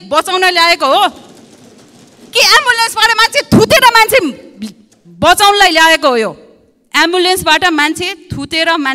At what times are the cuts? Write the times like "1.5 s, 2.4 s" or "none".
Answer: none